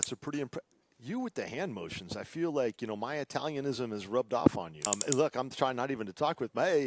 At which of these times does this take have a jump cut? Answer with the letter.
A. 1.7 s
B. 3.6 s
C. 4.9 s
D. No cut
C